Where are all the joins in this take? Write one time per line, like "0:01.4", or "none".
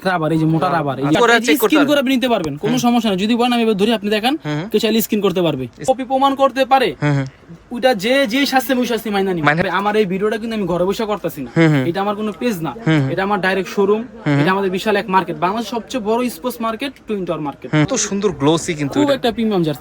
0:01.1
0:05.8
0:09.6
0:17.9